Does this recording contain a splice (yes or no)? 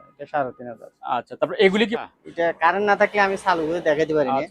yes